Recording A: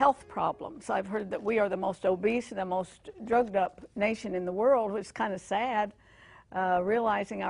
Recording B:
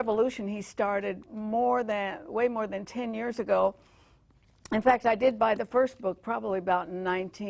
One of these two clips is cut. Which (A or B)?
A